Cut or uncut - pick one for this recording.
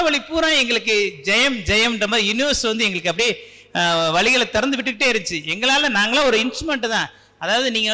uncut